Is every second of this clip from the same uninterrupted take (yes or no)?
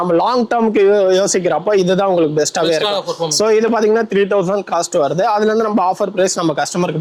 yes